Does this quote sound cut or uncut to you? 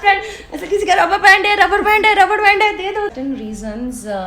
cut